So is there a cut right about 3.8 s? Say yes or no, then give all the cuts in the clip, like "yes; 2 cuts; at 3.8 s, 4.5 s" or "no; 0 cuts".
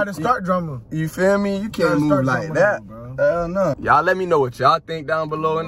yes; 1 cut; at 3.8 s